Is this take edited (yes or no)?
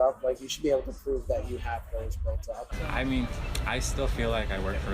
yes